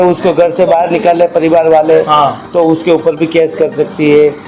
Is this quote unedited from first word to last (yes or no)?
yes